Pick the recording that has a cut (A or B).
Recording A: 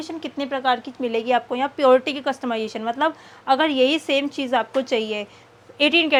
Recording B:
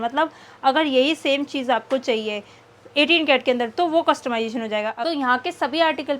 B